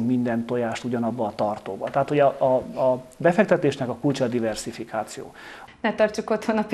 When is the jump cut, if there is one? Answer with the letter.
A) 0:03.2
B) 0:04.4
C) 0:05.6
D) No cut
C